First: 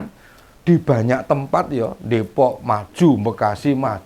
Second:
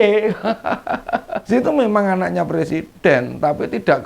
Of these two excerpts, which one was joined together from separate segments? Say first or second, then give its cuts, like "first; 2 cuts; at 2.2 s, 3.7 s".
second; 1 cut; at 1.3 s